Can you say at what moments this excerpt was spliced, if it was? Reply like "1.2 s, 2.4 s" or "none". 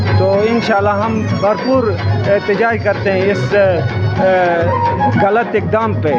none